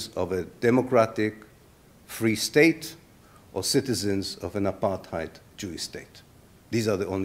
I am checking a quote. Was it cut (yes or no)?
no